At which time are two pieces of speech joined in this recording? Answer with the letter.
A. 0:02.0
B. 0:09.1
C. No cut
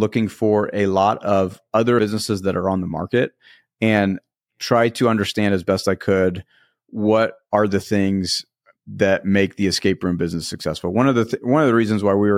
A